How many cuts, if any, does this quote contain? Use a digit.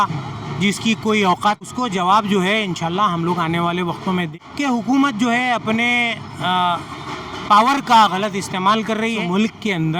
3